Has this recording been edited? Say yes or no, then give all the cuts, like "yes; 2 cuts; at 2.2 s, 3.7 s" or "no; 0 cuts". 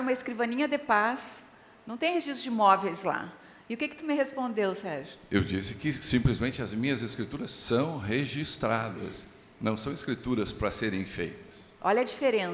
no; 0 cuts